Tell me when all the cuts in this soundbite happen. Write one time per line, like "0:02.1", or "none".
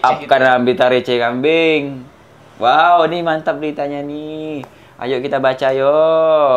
none